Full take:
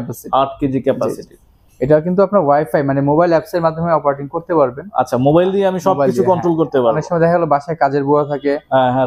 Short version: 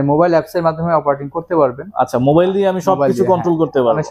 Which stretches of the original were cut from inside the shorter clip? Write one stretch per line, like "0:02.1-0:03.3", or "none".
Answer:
none